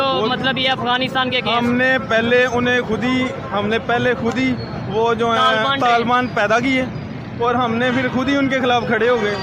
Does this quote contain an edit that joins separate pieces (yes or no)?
no